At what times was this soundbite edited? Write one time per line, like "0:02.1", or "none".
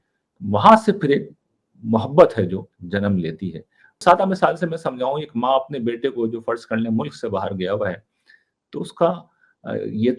0:03.9